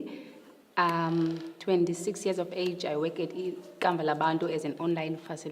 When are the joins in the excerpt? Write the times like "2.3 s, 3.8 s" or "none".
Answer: 1.7 s